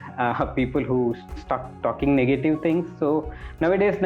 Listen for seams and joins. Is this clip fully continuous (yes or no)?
no